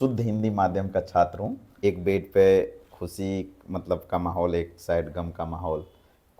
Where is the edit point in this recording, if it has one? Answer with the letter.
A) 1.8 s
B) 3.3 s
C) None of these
A